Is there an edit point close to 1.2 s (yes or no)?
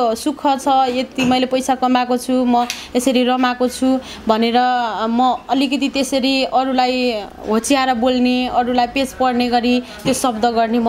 no